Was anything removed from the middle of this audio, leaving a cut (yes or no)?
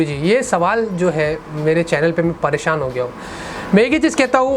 no